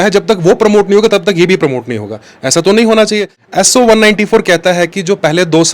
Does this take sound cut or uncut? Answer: cut